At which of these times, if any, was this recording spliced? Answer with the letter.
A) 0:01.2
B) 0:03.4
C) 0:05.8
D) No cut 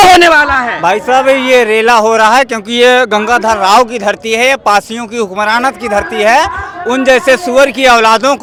D